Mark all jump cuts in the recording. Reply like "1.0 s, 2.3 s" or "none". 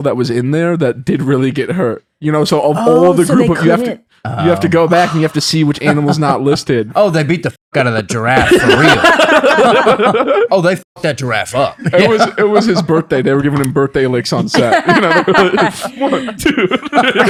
none